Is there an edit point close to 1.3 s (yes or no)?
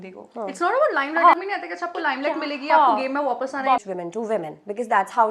yes